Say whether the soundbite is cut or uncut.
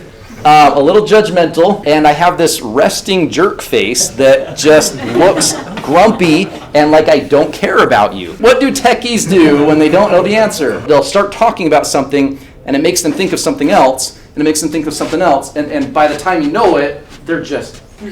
cut